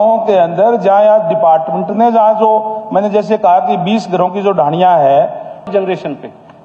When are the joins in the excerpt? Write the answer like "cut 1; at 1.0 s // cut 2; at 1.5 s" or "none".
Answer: cut 1; at 5.7 s